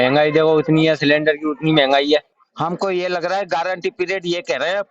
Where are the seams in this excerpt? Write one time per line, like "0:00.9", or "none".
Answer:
0:02.4